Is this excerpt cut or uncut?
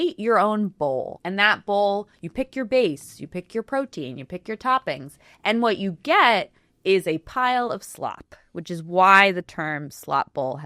cut